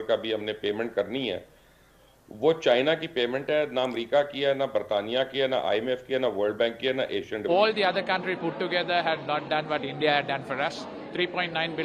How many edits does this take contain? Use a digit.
1